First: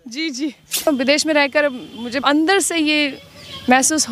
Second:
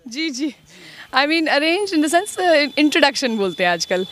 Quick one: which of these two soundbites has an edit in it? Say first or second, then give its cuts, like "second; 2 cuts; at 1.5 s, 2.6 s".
first; 2 cuts; at 0.9 s, 2.2 s